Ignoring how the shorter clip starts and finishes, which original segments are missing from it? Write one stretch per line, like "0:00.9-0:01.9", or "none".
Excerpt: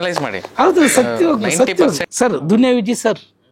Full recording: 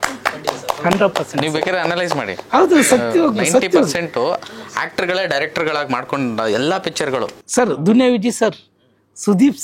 0:04.0-0:07.4